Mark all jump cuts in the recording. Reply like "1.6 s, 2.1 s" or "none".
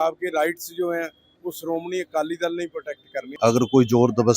3.3 s